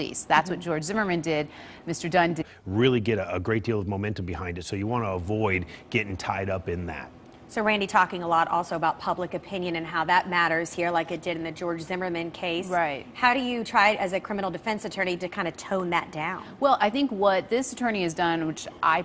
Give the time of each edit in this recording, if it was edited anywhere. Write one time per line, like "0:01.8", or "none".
none